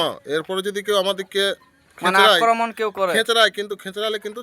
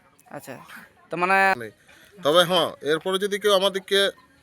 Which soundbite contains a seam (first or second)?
second